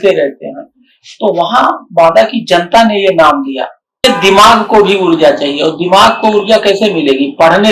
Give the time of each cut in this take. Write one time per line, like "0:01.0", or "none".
0:04.0